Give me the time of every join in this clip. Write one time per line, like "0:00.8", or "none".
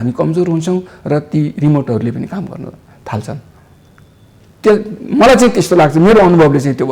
none